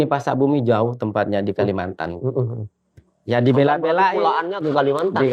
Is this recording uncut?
yes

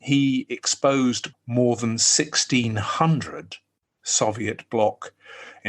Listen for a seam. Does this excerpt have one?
yes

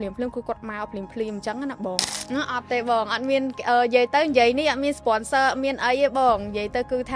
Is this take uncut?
no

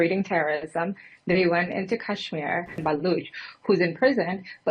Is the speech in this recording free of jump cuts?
no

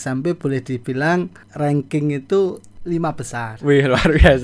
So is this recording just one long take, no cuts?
no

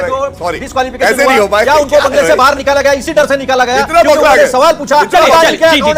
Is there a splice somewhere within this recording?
no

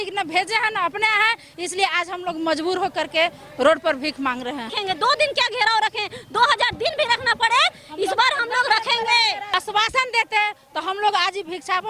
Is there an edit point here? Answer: yes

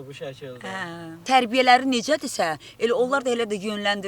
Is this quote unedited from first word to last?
no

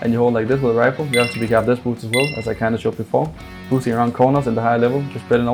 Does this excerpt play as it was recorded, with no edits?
yes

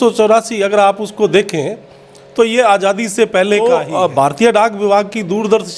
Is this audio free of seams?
no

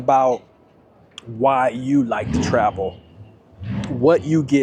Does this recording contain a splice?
no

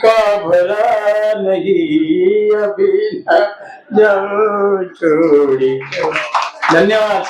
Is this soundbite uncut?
yes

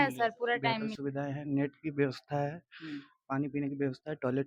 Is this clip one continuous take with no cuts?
no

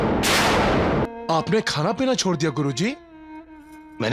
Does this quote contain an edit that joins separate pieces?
yes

